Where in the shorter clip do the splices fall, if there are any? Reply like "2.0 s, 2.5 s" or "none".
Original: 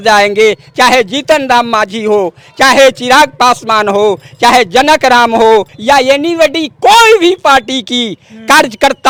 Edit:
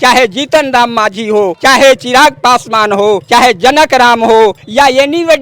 1.6 s, 3.2 s

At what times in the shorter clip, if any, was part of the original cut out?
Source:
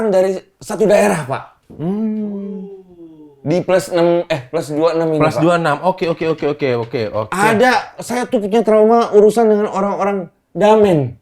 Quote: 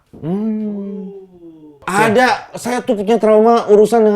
1.8 s

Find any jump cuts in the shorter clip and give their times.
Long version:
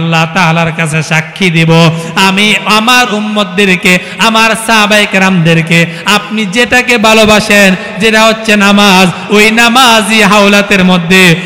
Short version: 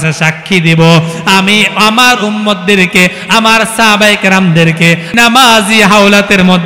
5.1 s

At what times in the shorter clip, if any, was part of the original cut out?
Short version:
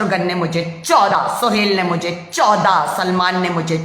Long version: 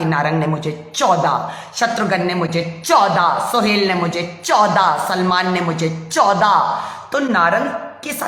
1.1 s

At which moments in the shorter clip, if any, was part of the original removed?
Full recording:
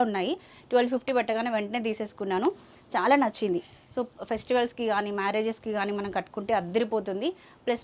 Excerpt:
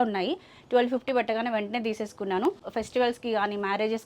2.7 s

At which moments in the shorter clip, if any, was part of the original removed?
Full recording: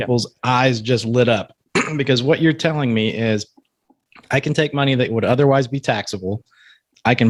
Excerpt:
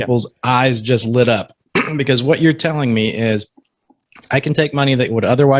none

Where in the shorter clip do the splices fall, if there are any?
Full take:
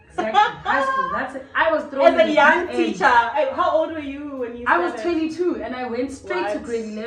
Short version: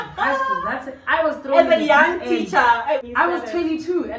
3.0 s

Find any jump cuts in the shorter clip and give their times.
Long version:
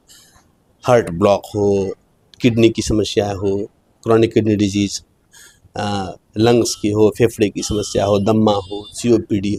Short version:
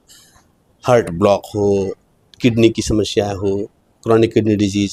none

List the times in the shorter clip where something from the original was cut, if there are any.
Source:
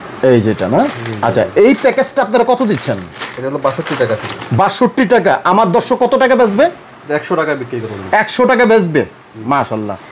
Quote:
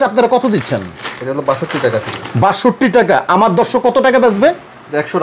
none

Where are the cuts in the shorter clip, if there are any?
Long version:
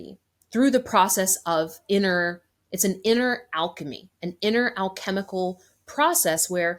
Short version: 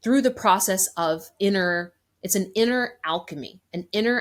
none

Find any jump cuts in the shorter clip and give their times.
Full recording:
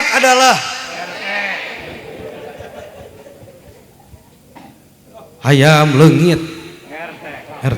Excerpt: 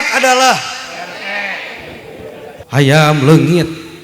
2.6 s

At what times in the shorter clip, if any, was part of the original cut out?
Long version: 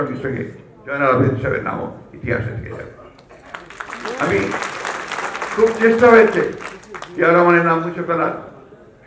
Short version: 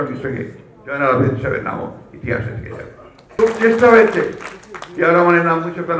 3.3 s

